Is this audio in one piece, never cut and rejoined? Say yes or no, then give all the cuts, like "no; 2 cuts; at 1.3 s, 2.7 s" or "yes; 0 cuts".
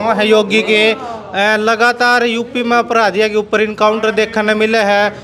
yes; 0 cuts